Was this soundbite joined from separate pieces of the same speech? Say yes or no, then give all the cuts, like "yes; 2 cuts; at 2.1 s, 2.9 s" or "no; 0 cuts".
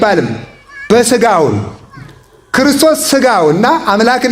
no; 0 cuts